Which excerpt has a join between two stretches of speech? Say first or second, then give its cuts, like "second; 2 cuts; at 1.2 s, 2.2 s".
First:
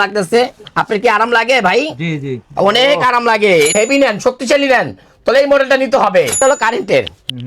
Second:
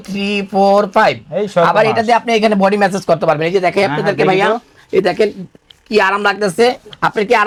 first; 2 cuts; at 3.7 s, 6.4 s